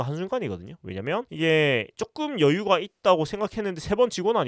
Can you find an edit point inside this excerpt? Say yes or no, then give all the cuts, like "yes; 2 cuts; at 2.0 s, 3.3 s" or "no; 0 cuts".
yes; 1 cut; at 1.3 s